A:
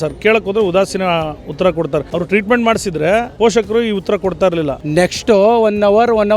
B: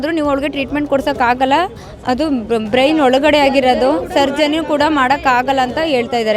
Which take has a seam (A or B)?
A